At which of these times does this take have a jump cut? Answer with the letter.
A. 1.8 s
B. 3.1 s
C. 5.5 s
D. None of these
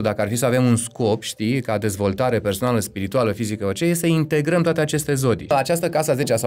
C